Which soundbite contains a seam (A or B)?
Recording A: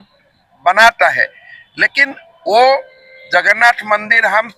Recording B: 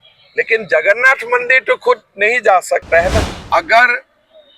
B